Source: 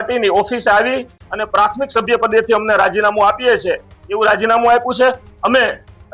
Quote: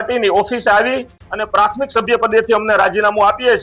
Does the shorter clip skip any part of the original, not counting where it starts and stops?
no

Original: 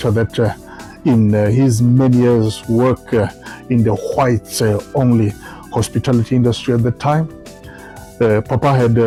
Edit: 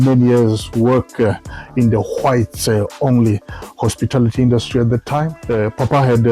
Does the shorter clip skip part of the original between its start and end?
yes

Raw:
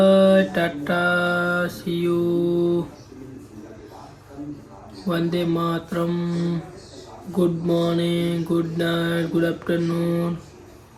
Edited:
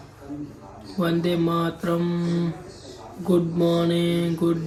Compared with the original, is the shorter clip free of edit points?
yes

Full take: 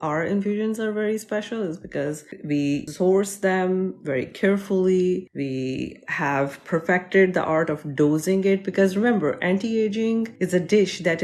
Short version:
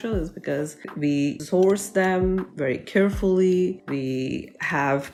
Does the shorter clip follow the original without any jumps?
yes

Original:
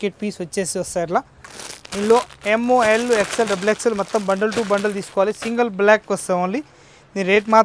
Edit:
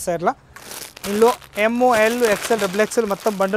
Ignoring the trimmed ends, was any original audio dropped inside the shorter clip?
no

